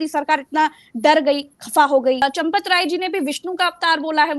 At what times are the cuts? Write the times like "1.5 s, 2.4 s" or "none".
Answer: 2.2 s

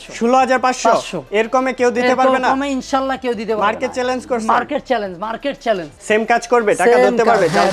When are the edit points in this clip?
5.9 s

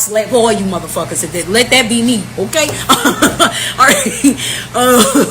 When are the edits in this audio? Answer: 3.2 s

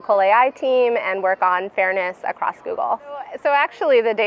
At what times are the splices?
3.3 s

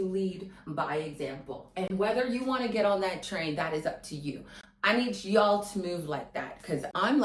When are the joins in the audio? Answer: none

